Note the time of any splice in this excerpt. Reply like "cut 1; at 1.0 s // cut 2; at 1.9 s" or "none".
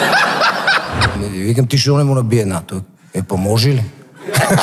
cut 1; at 1.2 s